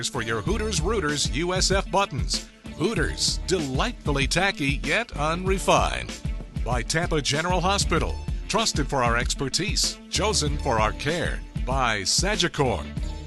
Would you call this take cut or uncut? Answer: uncut